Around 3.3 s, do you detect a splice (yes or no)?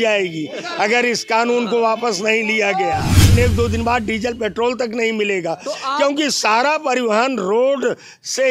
yes